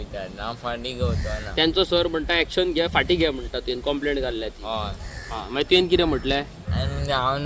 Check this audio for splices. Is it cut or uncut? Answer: uncut